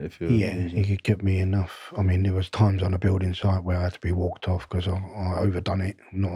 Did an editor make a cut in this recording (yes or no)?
no